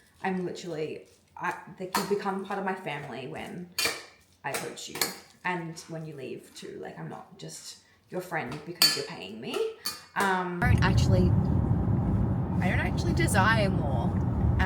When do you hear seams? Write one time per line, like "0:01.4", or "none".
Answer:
0:10.6